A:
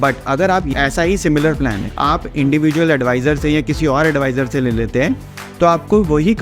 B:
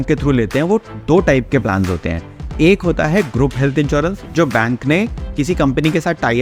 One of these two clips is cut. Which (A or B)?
A